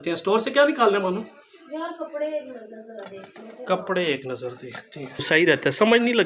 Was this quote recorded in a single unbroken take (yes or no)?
no